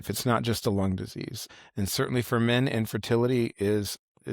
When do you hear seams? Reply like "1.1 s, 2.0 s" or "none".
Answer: 1.5 s